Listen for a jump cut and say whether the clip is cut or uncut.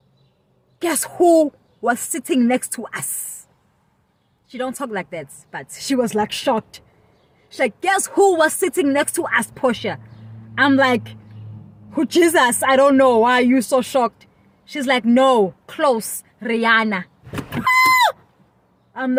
uncut